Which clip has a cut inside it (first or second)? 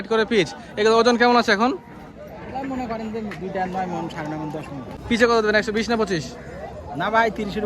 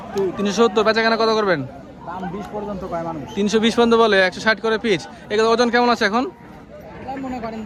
first